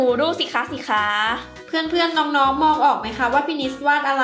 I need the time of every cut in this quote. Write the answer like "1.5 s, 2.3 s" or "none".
1.5 s